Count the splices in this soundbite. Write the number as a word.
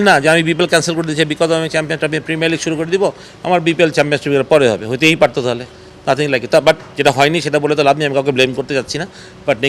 zero